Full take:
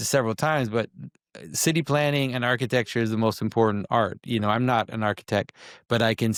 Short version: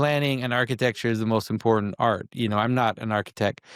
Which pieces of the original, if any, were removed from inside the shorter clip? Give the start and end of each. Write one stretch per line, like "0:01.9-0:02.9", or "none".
none